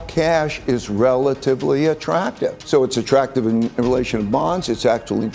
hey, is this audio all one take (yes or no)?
no